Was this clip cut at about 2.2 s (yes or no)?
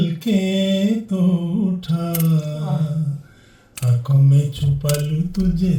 no